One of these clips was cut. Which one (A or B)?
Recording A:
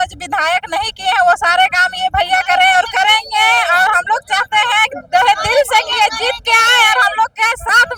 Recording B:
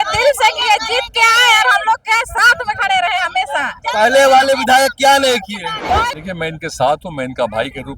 B